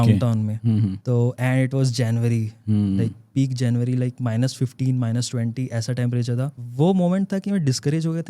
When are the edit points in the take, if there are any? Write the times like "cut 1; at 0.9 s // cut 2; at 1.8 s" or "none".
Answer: cut 1; at 1.0 s // cut 2; at 6.6 s